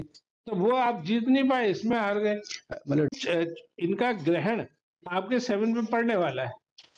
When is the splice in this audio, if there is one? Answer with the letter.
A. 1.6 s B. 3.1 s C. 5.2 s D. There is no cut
B